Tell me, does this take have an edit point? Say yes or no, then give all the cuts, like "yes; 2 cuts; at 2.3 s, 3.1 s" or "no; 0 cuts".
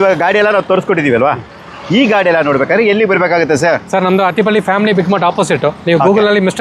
no; 0 cuts